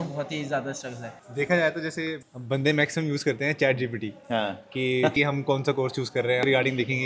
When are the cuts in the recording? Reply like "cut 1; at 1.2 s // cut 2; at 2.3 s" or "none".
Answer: none